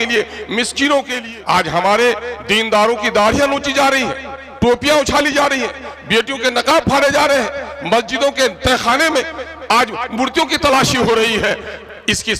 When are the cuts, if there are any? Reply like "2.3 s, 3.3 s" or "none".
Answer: 1.2 s